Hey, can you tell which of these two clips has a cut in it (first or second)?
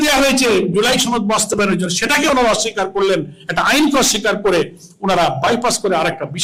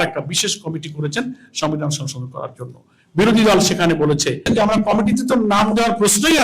second